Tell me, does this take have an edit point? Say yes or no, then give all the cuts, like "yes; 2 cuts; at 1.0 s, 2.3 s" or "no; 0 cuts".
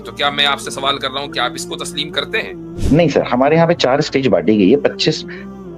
yes; 1 cut; at 2.7 s